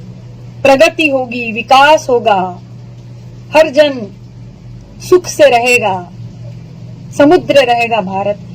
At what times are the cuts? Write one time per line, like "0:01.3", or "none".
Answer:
none